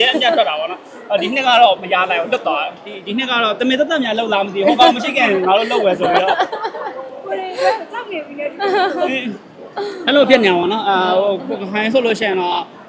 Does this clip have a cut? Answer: yes; 1 cut; at 3.0 s

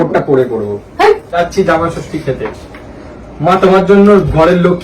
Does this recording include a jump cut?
yes; 1 cut; at 1.4 s

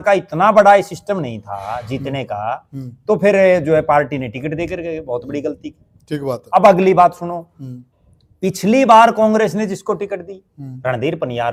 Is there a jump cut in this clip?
no; 0 cuts

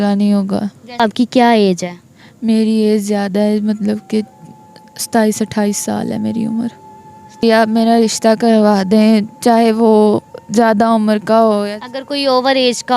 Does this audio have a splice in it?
yes; 2 cuts; at 1.0 s, 7.4 s

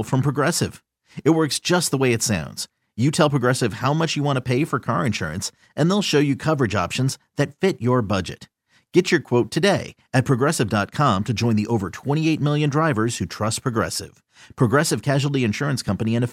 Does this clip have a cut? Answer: no; 0 cuts

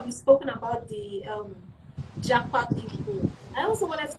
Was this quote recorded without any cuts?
yes; 0 cuts

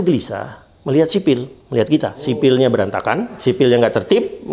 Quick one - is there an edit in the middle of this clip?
yes; 2 cuts; at 2.2 s, 3.4 s

